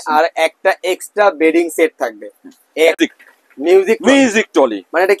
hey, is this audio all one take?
no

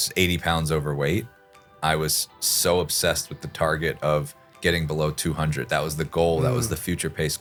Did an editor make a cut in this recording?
no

